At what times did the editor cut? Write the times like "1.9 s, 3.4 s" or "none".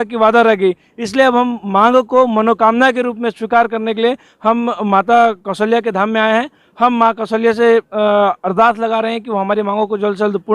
none